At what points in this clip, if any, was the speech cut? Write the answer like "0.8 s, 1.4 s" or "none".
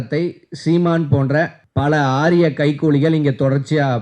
1.6 s